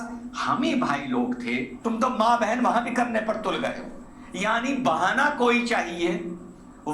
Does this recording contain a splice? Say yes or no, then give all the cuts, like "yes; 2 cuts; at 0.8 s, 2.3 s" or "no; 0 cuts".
yes; 1 cut; at 1.7 s